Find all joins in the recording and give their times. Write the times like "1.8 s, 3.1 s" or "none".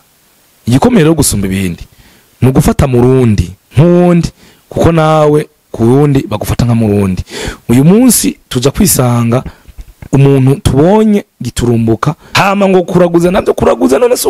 3.6 s, 12.2 s